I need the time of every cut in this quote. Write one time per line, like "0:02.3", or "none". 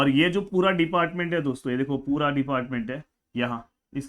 none